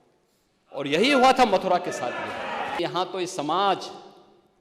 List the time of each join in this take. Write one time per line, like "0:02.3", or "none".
0:02.8